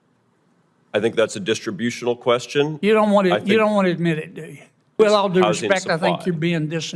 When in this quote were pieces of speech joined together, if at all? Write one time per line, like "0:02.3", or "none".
0:04.9